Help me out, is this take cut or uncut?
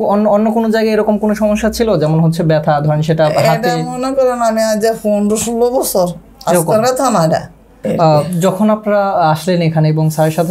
cut